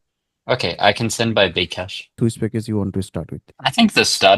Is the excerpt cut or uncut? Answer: cut